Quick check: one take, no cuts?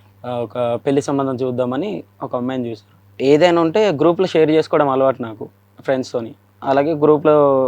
no; 2 cuts; at 3.0 s, 6.5 s

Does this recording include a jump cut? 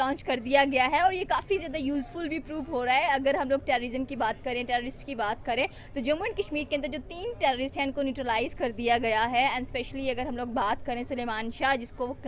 no; 0 cuts

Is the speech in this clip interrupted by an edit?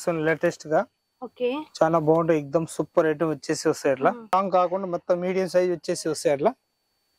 yes; 1 cut; at 4.3 s

